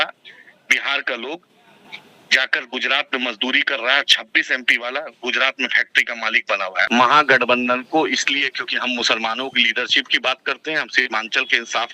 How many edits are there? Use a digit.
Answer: 1